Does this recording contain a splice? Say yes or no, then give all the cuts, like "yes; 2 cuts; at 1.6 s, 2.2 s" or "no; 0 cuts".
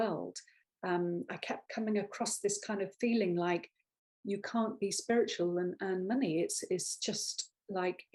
no; 0 cuts